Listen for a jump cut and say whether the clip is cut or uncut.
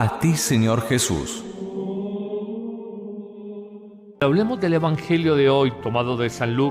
cut